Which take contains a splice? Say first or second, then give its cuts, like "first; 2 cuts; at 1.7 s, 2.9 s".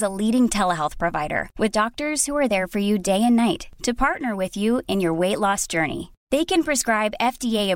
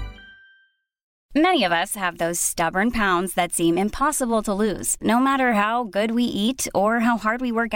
second; 1 cut; at 1.1 s